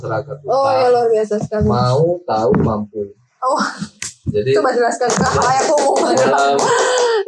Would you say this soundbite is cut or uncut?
uncut